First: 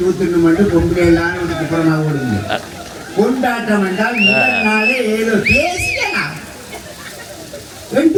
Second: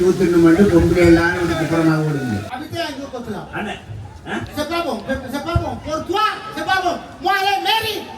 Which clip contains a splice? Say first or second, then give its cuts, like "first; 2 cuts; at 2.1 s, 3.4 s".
second; 1 cut; at 2.4 s